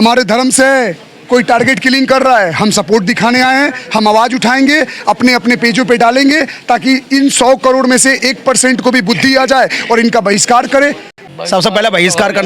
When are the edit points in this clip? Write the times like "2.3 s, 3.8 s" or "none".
11.1 s